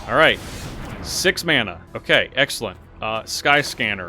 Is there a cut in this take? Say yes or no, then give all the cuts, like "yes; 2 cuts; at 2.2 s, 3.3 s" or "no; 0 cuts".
yes; 1 cut; at 1.9 s